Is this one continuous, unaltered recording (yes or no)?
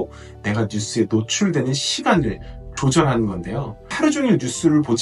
no